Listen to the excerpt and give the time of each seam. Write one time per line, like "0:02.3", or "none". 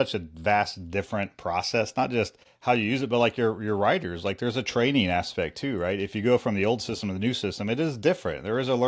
0:02.4

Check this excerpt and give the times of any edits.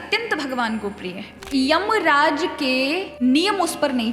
0:01.3
0:03.1

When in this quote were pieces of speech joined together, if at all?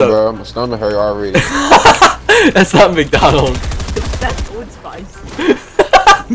0:04.0

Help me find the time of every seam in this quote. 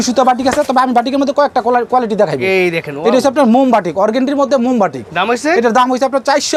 none

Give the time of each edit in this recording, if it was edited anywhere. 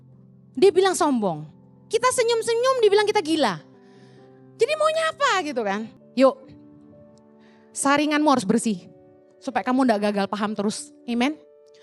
0:06.0

